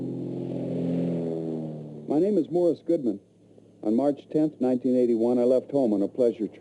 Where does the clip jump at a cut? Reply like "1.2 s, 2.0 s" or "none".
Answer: none